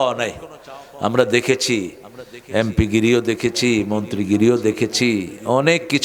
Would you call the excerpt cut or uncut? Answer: uncut